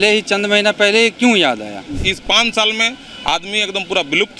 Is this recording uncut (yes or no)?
no